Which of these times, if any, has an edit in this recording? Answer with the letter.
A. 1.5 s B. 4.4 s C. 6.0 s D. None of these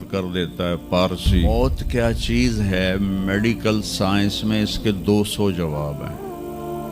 A